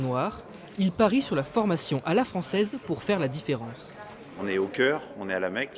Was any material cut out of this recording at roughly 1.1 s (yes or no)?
yes